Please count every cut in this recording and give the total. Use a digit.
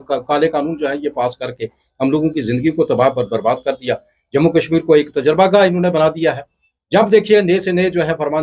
0